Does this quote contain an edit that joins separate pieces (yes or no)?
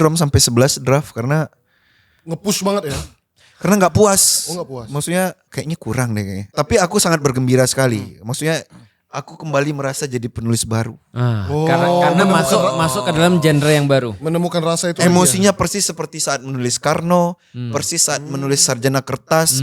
yes